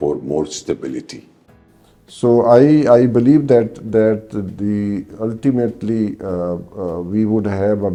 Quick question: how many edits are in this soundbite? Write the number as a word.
zero